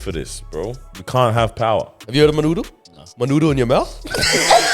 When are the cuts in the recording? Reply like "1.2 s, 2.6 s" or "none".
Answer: 0.9 s, 2.0 s